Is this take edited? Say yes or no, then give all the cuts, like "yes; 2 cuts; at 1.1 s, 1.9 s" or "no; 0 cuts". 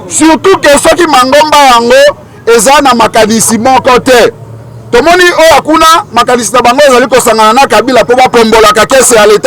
no; 0 cuts